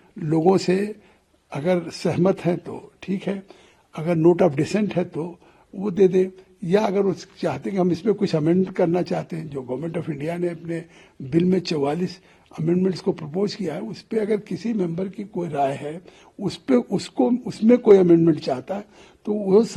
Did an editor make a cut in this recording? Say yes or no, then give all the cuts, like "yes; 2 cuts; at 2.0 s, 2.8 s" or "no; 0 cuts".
no; 0 cuts